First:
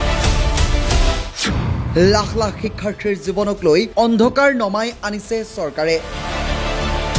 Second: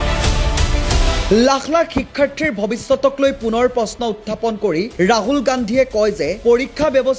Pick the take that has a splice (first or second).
first